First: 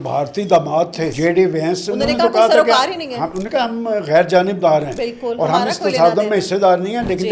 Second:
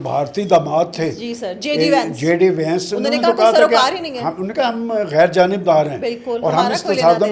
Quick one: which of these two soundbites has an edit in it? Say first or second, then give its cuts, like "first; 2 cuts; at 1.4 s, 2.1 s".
first; 1 cut; at 1.1 s